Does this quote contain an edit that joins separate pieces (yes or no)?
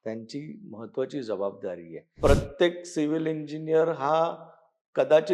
yes